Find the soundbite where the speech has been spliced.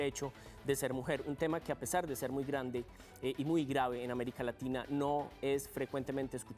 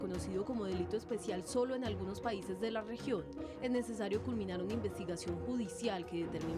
first; 1 cut; at 1.7 s

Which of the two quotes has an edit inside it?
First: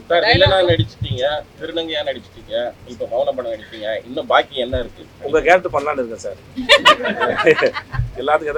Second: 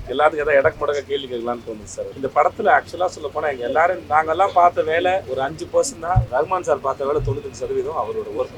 second; 3 cuts; at 2.1 s, 5.3 s, 6.2 s

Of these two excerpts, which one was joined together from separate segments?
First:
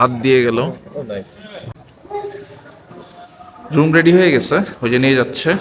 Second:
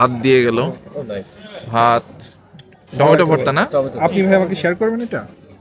first; 1 cut; at 1.7 s

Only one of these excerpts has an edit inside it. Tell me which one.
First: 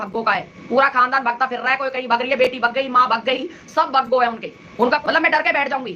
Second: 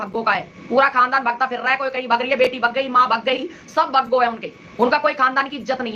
first; 1 cut; at 5.0 s

